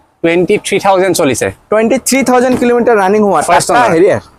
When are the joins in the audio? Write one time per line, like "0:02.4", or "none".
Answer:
none